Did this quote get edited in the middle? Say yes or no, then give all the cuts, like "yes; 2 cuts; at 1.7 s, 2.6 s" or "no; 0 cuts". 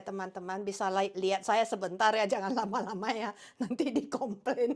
no; 0 cuts